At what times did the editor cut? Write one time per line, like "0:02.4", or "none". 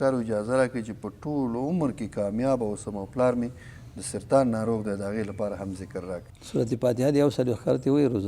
0:06.3